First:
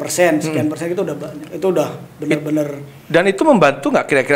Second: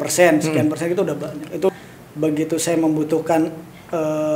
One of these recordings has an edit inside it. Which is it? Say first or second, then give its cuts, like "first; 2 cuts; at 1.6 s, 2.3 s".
second; 1 cut; at 1.7 s